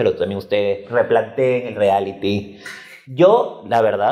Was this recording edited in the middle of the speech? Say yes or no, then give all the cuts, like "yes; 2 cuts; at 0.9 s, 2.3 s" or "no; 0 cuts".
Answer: no; 0 cuts